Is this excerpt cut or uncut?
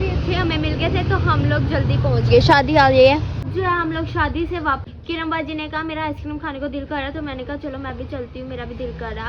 cut